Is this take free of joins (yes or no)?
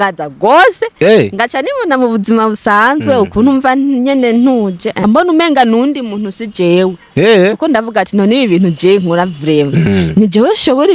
no